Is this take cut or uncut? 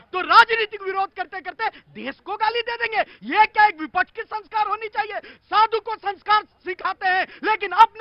uncut